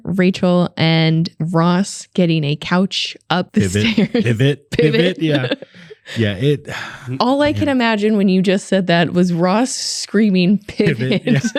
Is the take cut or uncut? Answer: uncut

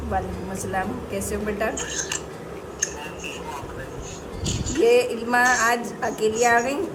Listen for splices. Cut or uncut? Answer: uncut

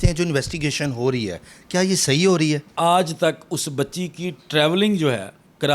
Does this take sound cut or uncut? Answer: cut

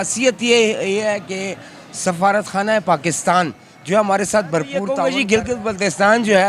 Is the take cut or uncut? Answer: cut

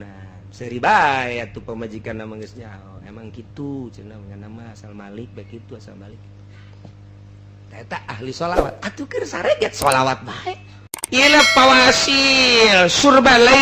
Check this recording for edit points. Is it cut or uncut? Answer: cut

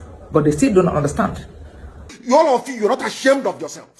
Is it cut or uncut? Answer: cut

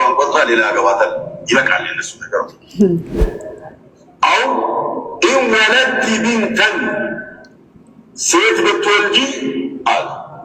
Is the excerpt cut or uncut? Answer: cut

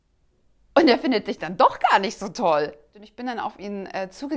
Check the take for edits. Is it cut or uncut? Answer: cut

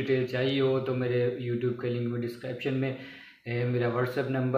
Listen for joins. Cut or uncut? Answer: uncut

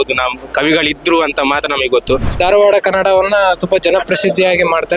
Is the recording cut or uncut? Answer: cut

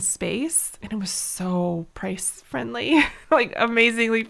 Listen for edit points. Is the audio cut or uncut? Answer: cut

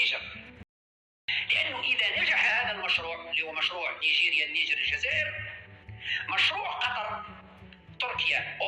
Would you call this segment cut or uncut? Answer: cut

